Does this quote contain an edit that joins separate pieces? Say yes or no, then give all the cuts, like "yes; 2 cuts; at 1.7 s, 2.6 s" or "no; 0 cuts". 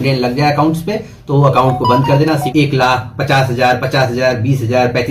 yes; 1 cut; at 2.5 s